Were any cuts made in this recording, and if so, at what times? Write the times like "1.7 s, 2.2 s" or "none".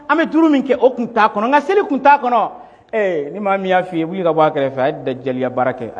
none